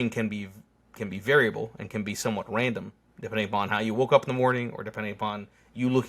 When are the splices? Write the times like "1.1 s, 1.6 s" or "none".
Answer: none